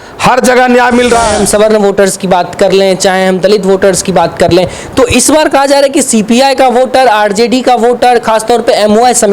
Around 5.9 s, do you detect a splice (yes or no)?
no